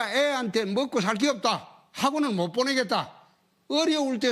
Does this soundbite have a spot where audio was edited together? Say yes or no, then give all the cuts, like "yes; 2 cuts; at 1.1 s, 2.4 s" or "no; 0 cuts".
yes; 1 cut; at 3.1 s